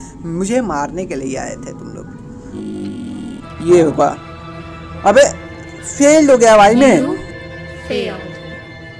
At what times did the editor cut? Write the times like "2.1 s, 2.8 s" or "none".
2.6 s